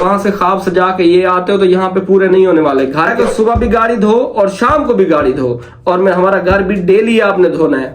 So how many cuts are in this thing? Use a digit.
1